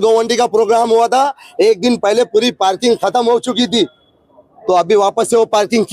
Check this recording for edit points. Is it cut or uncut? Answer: uncut